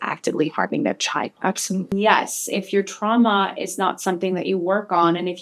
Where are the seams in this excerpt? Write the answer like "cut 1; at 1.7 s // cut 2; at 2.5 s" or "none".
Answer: cut 1; at 1.9 s